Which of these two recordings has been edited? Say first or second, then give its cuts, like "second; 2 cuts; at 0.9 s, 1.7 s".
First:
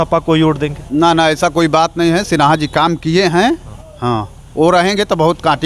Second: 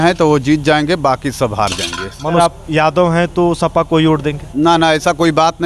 second; 1 cut; at 2.4 s